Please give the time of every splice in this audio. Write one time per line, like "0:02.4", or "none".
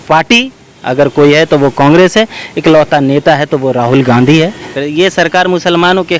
0:04.6